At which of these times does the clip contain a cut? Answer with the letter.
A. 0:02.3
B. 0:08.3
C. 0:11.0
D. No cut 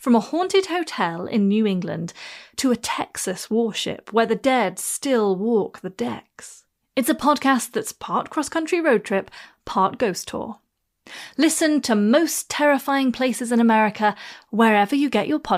D